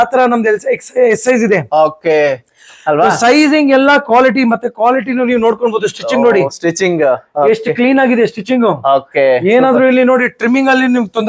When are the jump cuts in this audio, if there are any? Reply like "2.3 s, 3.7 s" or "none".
none